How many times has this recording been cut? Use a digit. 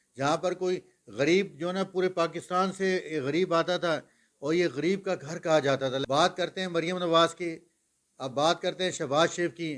1